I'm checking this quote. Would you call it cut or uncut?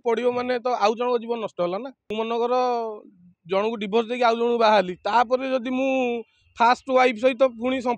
cut